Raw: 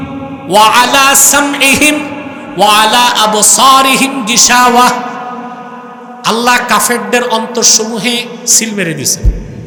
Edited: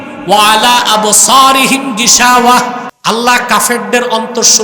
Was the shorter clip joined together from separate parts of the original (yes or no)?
yes